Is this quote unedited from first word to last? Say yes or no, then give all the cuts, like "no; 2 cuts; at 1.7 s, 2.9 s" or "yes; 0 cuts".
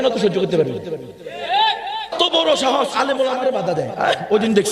no; 1 cut; at 2.1 s